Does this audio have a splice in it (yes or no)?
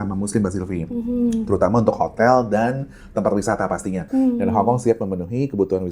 yes